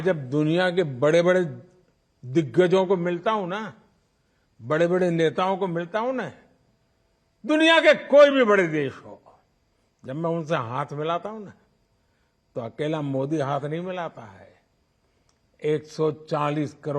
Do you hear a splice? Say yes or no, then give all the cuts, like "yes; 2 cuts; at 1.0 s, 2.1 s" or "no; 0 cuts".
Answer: no; 0 cuts